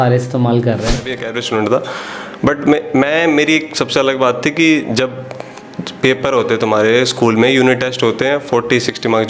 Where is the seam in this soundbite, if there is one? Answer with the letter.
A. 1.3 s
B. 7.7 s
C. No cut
A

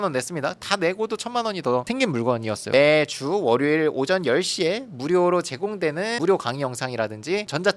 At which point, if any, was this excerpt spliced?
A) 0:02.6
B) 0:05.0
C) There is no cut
A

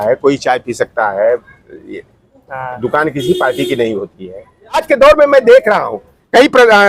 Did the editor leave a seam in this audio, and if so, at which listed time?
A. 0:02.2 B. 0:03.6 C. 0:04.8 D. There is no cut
C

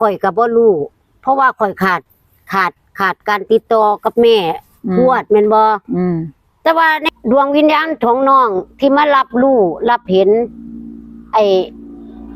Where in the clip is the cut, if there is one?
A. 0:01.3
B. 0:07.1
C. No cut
B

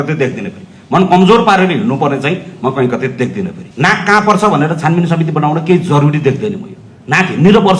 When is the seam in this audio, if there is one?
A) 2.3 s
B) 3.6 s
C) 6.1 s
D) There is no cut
B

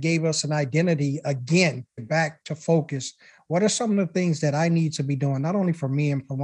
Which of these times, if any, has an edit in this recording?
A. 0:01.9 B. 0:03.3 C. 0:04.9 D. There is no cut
A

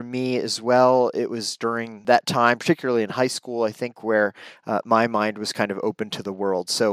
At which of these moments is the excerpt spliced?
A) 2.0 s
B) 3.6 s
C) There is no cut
A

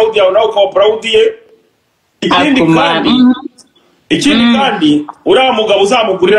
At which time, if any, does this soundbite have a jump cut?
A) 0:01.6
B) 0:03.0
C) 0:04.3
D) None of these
D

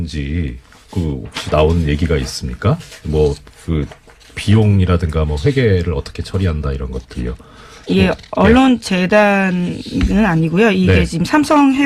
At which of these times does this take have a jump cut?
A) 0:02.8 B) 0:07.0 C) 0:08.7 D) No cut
D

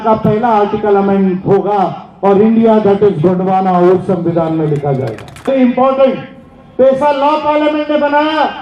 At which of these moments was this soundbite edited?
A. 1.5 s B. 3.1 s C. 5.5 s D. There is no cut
C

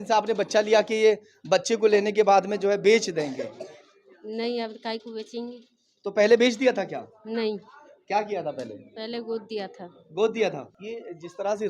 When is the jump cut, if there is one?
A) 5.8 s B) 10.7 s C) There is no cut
B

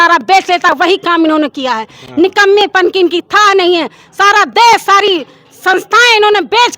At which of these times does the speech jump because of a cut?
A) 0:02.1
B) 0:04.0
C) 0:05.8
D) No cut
D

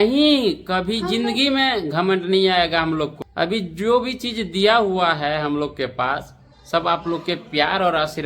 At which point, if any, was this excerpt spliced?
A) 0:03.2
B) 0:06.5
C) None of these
A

